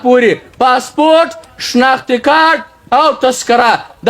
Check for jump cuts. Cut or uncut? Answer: uncut